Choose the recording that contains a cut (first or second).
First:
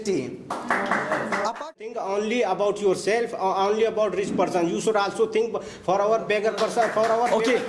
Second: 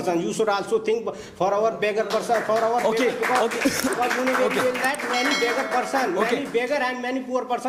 first